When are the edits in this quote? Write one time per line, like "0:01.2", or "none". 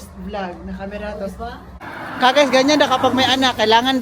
0:01.8